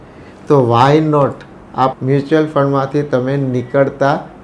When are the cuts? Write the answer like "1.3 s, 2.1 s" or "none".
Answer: 1.9 s

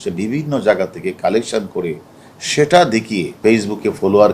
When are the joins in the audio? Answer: 3.3 s

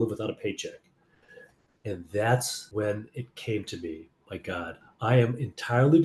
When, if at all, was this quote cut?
2.6 s, 4.8 s

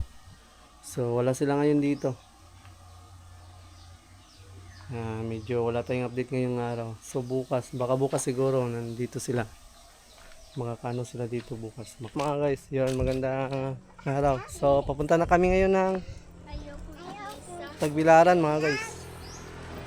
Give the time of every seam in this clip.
12.1 s

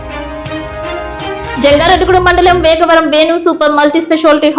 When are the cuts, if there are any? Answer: 1.6 s

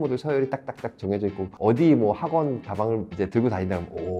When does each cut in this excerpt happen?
1.5 s

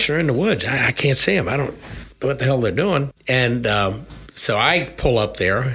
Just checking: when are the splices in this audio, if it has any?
3.1 s

